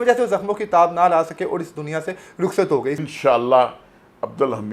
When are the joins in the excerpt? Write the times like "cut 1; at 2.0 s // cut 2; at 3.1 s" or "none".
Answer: cut 1; at 3.0 s